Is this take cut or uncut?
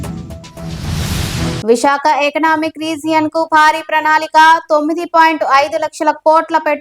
cut